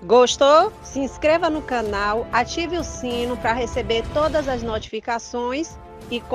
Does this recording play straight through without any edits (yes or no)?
yes